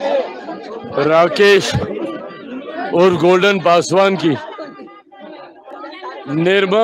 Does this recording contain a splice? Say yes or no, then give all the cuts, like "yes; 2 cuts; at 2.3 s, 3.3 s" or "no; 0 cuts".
no; 0 cuts